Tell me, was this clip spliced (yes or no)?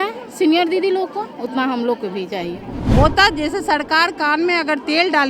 yes